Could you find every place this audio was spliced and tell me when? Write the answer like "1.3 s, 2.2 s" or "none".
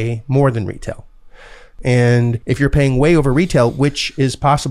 1.7 s, 2.4 s